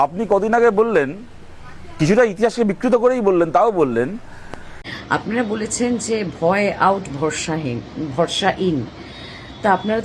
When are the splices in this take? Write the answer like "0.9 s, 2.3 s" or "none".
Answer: 4.7 s